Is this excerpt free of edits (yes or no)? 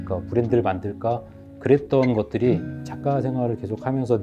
yes